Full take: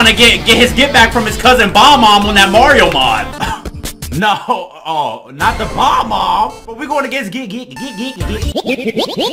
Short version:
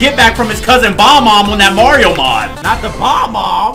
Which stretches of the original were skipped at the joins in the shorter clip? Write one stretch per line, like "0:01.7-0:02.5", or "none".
0:03.3-0:05.3